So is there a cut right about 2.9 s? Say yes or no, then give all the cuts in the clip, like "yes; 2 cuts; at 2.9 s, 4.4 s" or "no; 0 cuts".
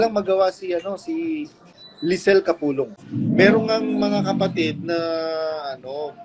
yes; 1 cut; at 2.9 s